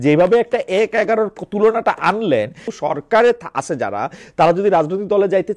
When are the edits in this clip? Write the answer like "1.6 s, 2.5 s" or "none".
2.7 s